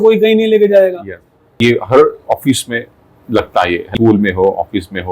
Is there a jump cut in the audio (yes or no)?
yes